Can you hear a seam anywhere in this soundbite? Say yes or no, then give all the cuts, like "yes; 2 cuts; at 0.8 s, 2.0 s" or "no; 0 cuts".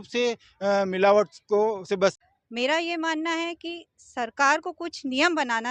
yes; 1 cut; at 2.2 s